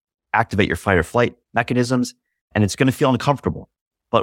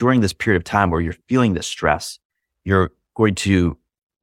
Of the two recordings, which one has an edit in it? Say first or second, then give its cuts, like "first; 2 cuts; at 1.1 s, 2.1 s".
first; 1 cut; at 1.4 s